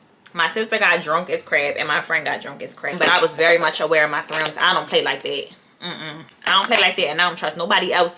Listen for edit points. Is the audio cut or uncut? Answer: cut